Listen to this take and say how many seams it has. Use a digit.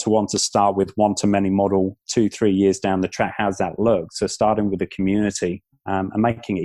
2